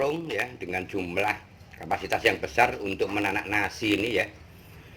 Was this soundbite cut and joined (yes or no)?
no